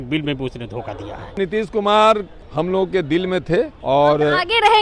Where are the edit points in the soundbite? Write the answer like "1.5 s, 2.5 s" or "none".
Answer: 1.4 s, 2.4 s, 3.8 s